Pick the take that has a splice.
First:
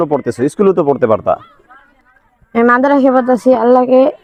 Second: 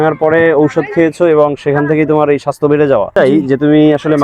second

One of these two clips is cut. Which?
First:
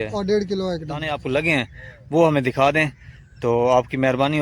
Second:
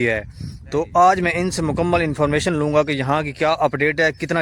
first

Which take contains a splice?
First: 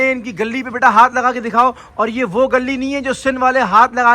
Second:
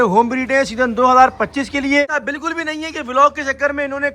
second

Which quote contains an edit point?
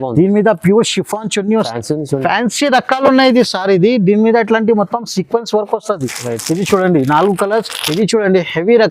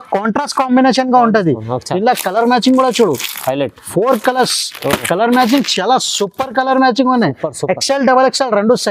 first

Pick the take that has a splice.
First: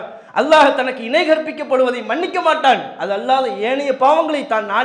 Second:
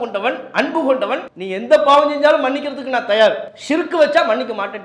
second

